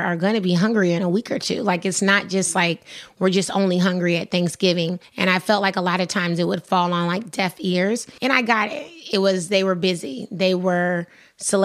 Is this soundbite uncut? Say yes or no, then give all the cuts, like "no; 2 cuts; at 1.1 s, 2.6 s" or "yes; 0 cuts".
no; 2 cuts; at 5.0 s, 8.1 s